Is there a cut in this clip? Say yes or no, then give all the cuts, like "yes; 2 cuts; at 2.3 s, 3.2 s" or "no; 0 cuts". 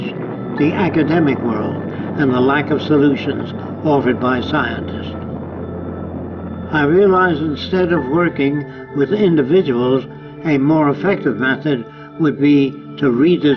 yes; 1 cut; at 7.4 s